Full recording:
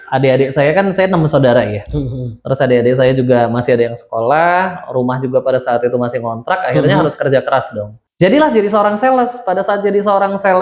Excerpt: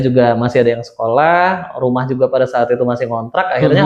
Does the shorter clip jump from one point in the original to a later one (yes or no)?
no